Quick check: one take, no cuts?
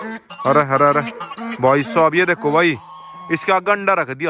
yes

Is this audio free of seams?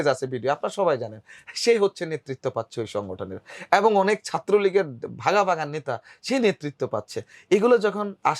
yes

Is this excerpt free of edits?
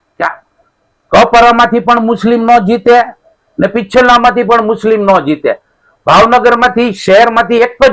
yes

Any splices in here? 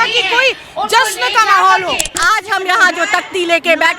yes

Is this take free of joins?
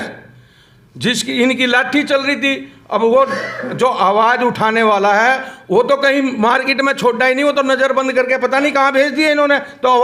yes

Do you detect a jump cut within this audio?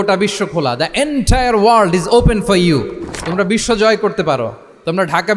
no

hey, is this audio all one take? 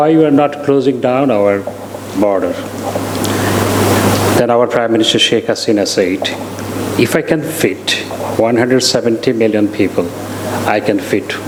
yes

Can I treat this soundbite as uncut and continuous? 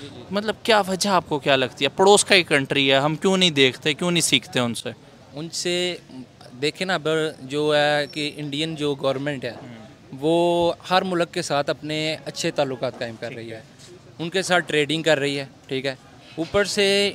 yes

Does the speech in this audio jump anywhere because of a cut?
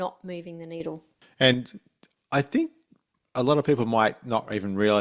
yes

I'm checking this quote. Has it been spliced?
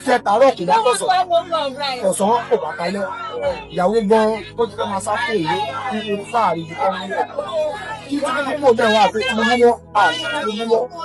no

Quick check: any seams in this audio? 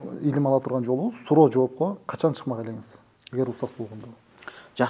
no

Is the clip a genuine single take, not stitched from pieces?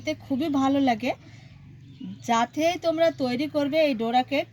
yes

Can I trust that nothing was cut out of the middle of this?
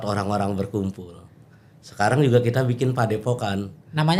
yes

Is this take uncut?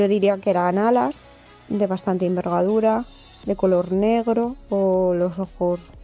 no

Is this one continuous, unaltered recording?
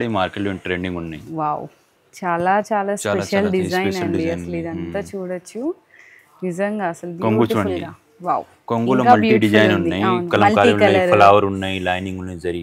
yes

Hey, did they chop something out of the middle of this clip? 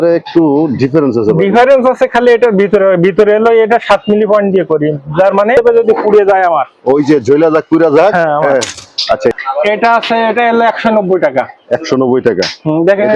yes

